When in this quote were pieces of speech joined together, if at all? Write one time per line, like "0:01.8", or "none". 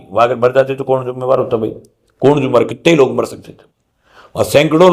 none